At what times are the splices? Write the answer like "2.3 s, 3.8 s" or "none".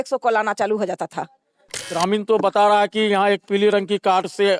1.9 s